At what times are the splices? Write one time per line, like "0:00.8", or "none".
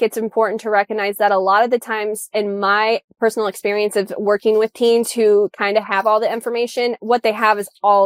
none